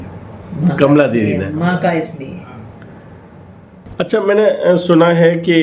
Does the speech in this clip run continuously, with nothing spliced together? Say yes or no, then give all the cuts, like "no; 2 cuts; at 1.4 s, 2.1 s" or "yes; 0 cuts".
no; 1 cut; at 3.8 s